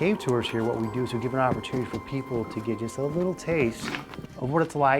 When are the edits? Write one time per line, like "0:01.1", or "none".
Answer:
0:03.9